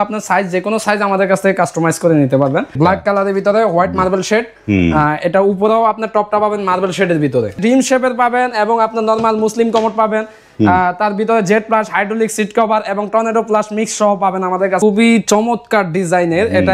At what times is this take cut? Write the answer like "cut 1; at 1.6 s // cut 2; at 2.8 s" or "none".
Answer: cut 1; at 2.7 s // cut 2; at 7.5 s // cut 3; at 14.8 s